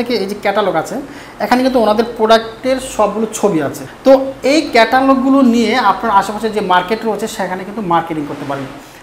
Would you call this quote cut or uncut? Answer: cut